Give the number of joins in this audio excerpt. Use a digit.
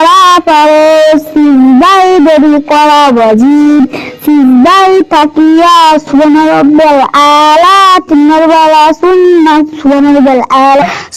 0